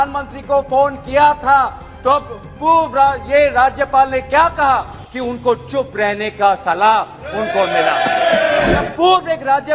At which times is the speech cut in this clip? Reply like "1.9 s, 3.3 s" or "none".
8.8 s

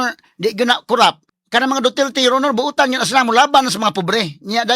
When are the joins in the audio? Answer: 1.3 s

